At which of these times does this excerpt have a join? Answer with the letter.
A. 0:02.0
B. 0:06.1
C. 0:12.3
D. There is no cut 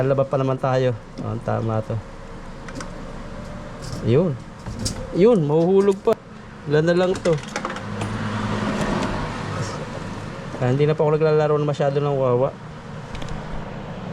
B